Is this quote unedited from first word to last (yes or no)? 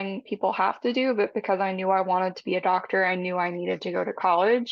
yes